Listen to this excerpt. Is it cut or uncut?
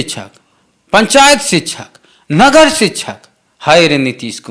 uncut